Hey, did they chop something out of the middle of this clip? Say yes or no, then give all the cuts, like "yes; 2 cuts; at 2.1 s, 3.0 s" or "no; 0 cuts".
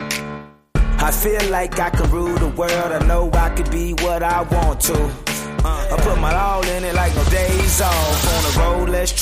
no; 0 cuts